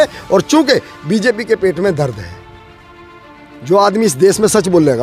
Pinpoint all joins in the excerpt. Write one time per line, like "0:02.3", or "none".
none